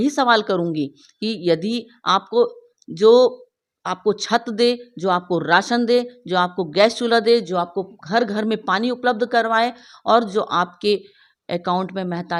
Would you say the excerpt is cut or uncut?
uncut